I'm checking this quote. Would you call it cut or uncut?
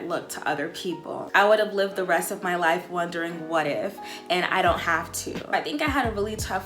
cut